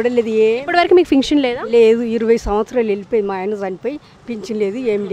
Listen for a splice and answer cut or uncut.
uncut